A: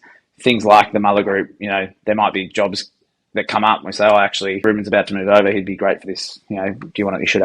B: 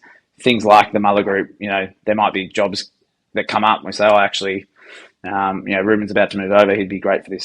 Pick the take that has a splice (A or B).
A